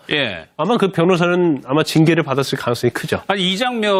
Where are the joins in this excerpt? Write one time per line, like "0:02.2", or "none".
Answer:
none